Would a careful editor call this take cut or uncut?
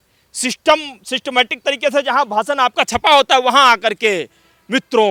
uncut